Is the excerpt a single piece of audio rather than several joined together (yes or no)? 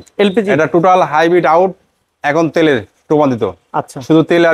yes